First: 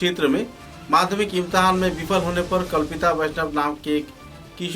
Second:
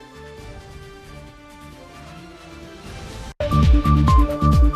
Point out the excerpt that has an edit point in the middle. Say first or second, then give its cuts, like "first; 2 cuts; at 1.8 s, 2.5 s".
second; 1 cut; at 3.3 s